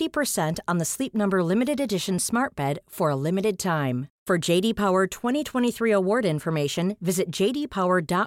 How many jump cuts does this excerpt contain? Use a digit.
0